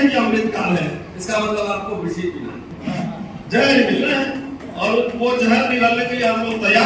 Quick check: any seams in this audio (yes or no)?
yes